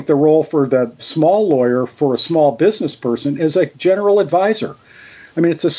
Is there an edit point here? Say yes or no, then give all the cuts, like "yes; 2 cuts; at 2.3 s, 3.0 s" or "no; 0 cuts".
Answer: yes; 2 cuts; at 1.0 s, 3.8 s